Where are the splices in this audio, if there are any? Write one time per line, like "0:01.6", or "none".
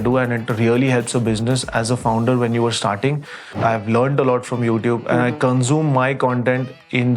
0:03.5

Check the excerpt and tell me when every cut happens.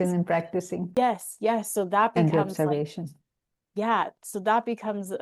0:00.9

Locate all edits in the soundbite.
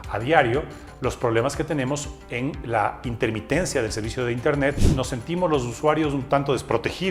0:04.8

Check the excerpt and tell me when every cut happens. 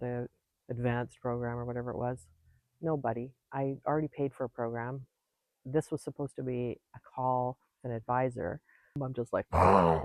0:09.0

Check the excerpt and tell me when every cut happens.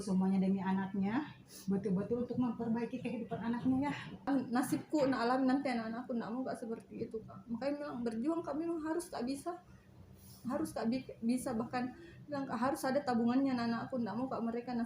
0:04.3

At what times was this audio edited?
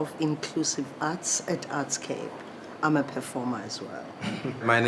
none

